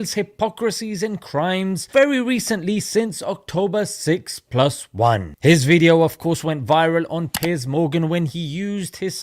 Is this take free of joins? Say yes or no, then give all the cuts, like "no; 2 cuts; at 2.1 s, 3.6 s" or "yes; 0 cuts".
no; 1 cut; at 5.3 s